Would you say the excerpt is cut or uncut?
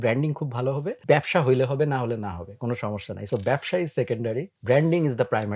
cut